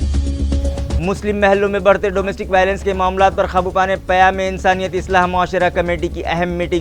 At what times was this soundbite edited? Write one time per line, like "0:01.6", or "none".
0:01.0